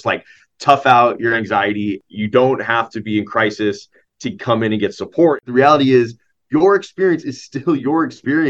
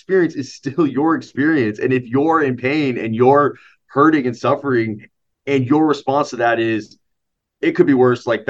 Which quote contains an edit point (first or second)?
first